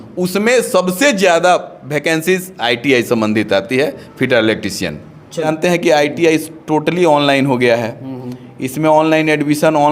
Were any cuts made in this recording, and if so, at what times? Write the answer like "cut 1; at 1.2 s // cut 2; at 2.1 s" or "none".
cut 1; at 5.5 s